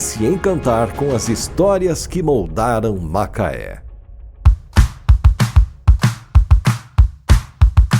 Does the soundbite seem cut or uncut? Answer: cut